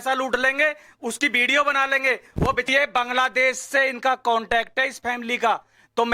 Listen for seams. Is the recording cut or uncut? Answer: cut